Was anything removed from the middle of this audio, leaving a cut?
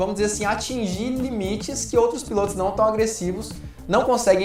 no; 0 cuts

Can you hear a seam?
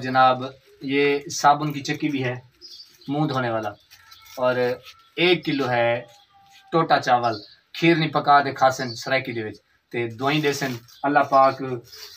no; 0 cuts

